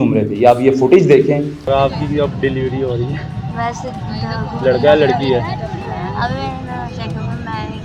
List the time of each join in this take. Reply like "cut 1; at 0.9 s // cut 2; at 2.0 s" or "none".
none